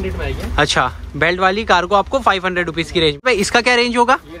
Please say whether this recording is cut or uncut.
cut